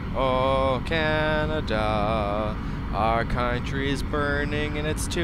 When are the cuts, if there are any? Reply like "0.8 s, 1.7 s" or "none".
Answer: none